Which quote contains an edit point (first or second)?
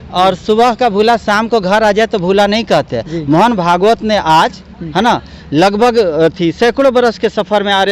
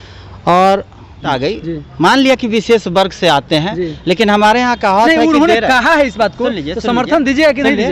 second